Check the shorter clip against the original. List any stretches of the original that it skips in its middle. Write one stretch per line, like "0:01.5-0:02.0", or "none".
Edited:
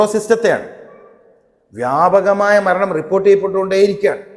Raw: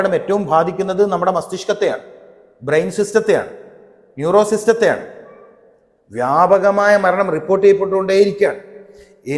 none